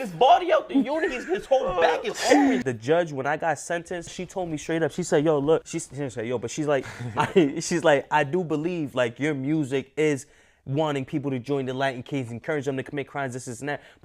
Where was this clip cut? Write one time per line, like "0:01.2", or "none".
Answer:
0:02.6
0:04.2
0:05.8